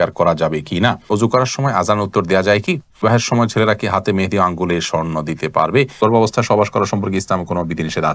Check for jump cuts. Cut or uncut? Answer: cut